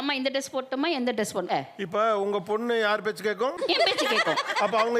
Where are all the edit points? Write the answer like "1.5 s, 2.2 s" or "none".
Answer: 1.5 s, 3.6 s